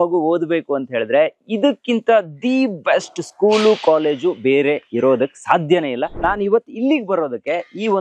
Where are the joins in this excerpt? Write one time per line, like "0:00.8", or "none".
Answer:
0:06.1